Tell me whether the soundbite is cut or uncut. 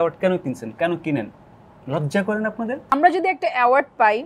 cut